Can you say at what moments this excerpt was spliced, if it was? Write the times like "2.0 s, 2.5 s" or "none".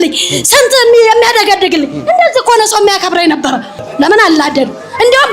3.8 s